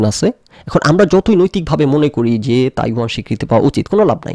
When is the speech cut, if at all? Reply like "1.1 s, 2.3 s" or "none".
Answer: none